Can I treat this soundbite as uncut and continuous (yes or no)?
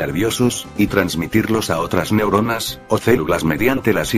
no